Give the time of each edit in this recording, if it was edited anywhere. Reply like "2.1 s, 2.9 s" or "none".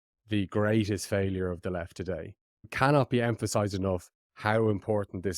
2.7 s

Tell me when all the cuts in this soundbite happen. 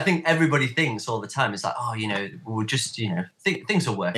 none

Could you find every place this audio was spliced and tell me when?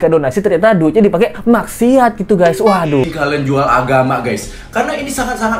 3.0 s

